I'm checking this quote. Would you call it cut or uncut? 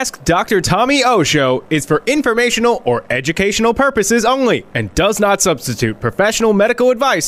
uncut